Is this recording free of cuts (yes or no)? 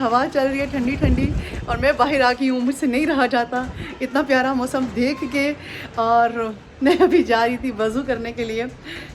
yes